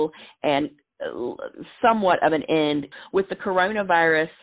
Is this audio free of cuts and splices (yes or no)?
no